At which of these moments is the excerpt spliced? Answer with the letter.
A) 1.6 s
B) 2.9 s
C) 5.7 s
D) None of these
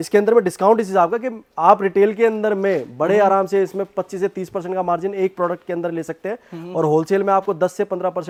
D